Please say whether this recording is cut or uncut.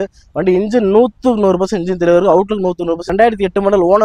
uncut